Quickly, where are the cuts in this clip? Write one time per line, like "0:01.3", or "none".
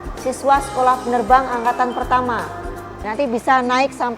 0:03.1